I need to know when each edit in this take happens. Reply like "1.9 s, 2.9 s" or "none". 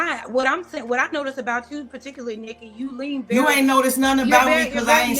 1.4 s